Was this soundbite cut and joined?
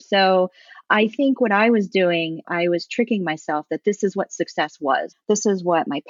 yes; 2 cuts; at 2.5 s, 5.1 s

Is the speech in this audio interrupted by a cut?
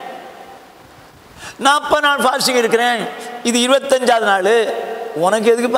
no; 0 cuts

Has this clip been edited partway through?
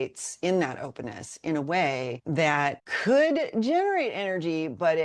no; 0 cuts

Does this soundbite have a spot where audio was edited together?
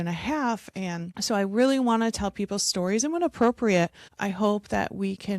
yes; 2 cuts; at 1.1 s, 4.1 s

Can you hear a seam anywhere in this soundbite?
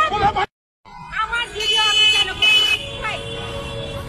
no; 0 cuts

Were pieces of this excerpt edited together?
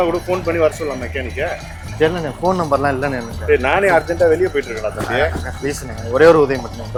no; 0 cuts

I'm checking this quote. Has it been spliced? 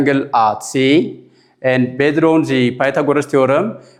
no; 0 cuts

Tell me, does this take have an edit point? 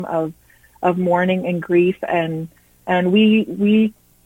no; 0 cuts

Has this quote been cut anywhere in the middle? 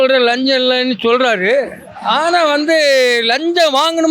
no; 0 cuts

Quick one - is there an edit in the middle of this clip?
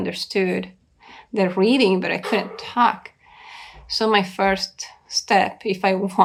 no; 0 cuts

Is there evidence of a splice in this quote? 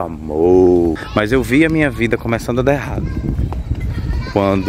yes; 1 cut; at 1.0 s

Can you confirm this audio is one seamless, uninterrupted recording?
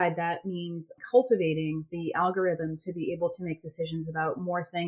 no; 1 cut; at 0.9 s

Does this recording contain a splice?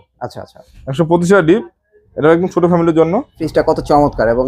yes; 1 cut; at 3.4 s

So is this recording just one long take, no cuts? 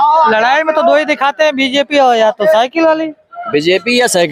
yes; 0 cuts

